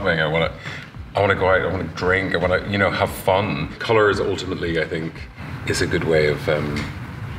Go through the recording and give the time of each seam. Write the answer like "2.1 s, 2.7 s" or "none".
3.7 s, 5.5 s